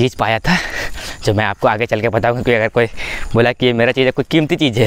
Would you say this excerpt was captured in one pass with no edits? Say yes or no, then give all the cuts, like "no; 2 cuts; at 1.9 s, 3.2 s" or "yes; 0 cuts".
yes; 0 cuts